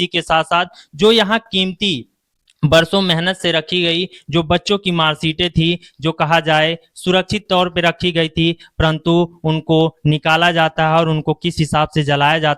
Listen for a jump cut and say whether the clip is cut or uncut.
uncut